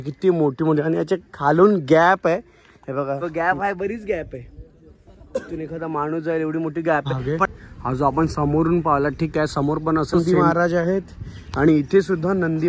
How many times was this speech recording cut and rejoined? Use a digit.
3